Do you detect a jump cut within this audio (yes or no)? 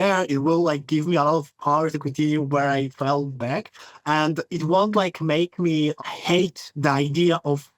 no